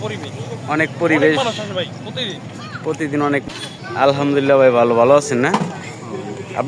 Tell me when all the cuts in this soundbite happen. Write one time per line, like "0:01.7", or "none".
0:03.4